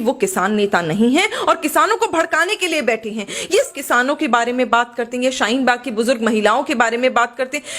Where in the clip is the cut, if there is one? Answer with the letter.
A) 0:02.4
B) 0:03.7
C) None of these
B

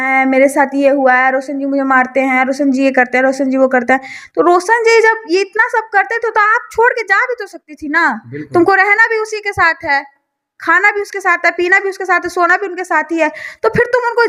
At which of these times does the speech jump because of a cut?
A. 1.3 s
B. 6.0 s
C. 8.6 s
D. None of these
D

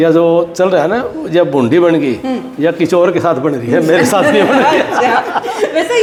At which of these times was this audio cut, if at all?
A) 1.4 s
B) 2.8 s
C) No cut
C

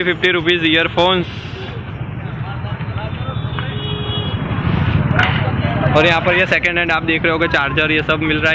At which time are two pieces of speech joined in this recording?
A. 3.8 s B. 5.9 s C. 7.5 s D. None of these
D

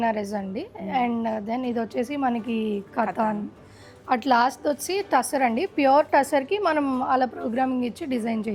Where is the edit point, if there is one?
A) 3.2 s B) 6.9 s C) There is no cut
C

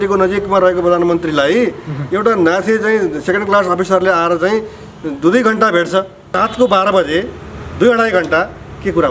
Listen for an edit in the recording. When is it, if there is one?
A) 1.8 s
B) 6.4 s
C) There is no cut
B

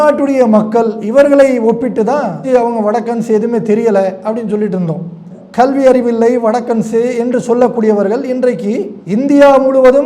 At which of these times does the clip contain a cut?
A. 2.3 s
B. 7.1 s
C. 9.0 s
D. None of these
D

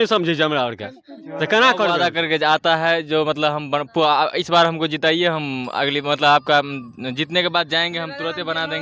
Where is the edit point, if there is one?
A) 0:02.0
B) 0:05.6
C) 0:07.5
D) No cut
A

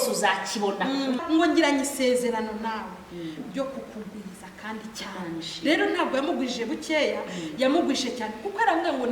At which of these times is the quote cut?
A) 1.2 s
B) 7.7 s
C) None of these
A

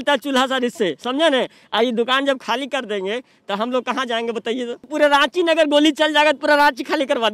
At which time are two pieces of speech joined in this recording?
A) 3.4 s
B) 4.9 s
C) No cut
B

